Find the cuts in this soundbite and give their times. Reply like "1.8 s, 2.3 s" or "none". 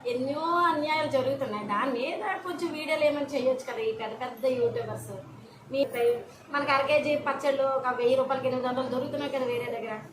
5.8 s